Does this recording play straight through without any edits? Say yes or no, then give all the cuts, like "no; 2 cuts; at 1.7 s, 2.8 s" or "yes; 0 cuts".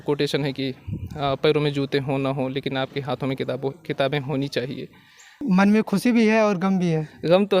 no; 1 cut; at 5.4 s